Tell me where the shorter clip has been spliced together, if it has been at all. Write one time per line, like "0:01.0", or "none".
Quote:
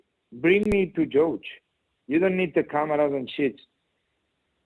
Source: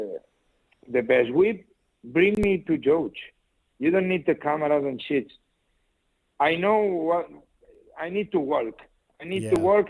none